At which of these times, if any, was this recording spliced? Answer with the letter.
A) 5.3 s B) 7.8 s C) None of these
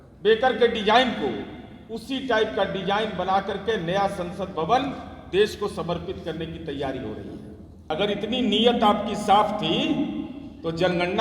B